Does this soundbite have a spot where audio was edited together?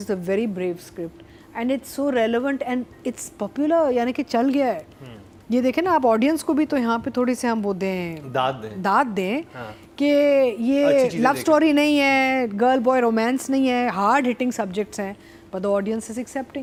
no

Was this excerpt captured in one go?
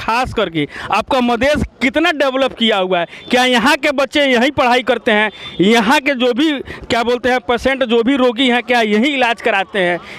yes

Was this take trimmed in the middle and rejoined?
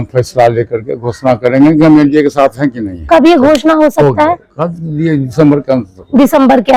no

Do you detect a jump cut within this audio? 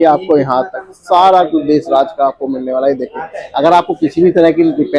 no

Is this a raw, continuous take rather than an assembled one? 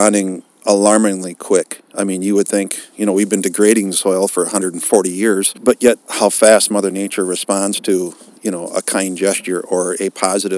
no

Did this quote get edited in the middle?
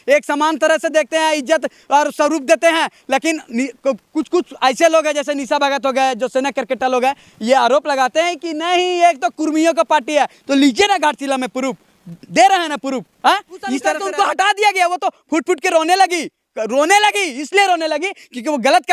yes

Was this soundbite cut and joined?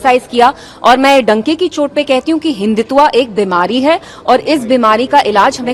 no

